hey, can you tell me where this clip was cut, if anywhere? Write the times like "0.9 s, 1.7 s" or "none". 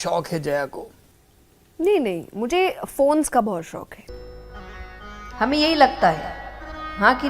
4.0 s

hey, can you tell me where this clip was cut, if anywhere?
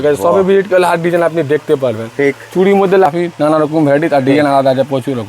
3.1 s

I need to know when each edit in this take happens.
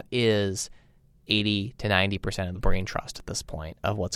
2.5 s

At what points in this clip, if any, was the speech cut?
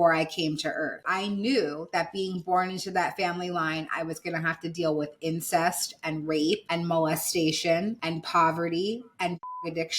1.0 s

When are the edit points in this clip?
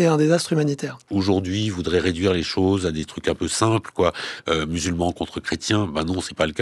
1.0 s

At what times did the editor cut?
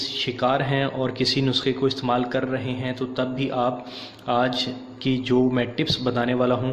none

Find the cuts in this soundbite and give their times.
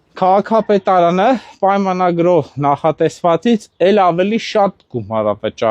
none

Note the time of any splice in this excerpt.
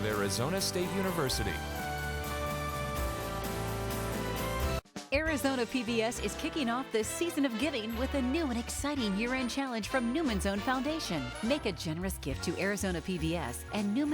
4.8 s

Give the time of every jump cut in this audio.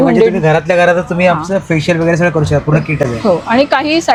none

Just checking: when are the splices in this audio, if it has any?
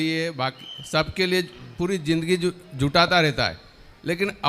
none

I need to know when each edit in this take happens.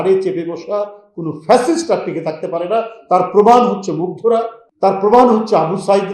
4.6 s

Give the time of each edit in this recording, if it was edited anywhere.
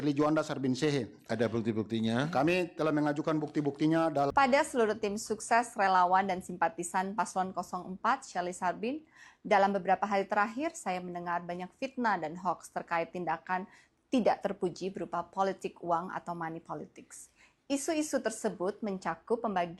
4.3 s

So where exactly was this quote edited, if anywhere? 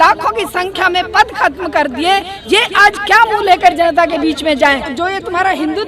4.9 s

